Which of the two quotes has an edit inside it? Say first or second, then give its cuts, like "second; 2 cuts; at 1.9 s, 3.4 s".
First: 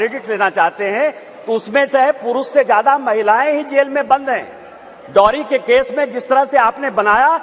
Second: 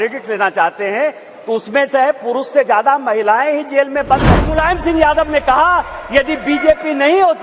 second; 1 cut; at 4.5 s